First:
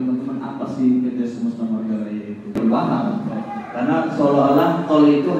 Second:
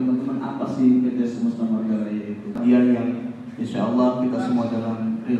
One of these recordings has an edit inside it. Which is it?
first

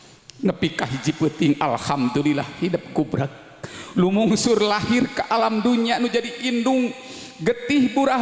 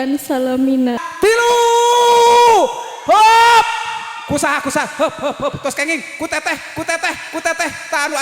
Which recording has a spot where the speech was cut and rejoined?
second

